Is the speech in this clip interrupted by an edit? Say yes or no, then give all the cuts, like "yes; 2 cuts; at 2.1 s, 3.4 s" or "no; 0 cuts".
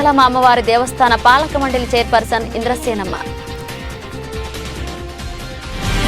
no; 0 cuts